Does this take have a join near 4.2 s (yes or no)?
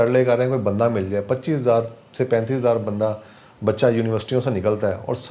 no